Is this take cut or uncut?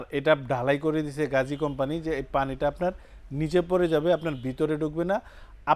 uncut